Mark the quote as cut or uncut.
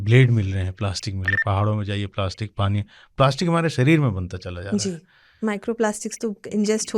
cut